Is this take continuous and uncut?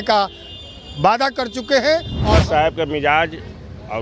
no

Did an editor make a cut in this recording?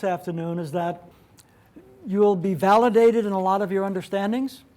yes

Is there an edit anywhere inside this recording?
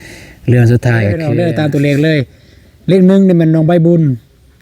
yes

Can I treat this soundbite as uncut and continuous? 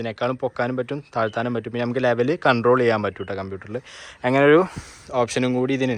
yes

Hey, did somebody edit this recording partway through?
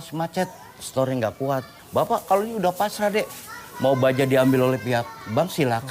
yes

